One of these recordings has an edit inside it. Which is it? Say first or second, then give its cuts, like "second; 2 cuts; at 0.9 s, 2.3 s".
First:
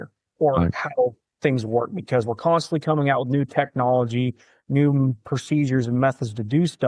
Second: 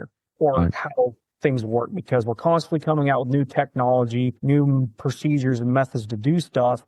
second; 1 cut; at 4.4 s